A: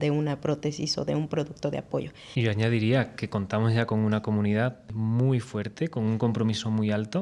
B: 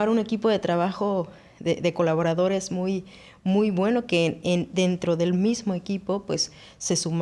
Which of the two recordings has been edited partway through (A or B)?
A